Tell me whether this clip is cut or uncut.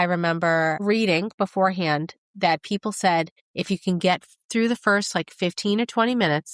uncut